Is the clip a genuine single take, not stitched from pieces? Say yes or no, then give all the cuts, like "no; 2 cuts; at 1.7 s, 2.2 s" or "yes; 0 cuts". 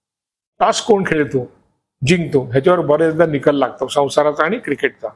yes; 0 cuts